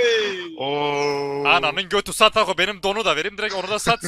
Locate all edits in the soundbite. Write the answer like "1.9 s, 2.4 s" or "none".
none